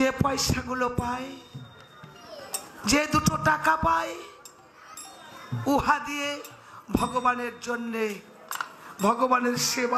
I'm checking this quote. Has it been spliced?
no; 0 cuts

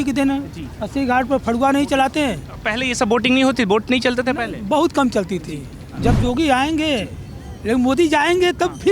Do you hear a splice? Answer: yes; 1 cut; at 6.2 s

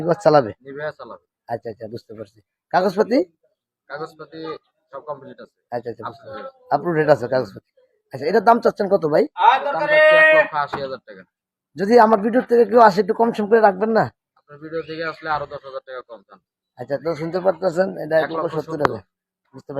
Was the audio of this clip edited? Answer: no; 0 cuts

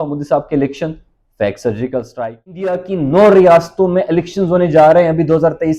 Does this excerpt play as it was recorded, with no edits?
no; 1 cut; at 2.7 s

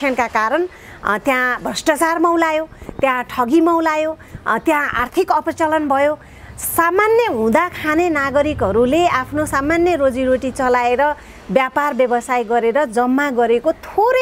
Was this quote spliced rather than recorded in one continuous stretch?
no; 0 cuts

